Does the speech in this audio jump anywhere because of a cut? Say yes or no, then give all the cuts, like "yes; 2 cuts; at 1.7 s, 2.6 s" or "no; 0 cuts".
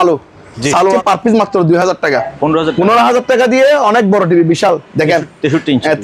yes; 2 cuts; at 1.0 s, 2.1 s